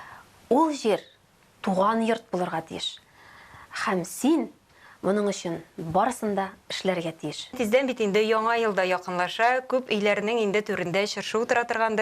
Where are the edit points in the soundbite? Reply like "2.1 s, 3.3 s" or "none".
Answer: 7.6 s